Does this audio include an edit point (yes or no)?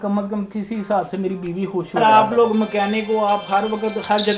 yes